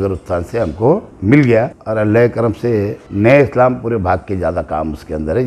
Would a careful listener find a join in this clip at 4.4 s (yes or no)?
no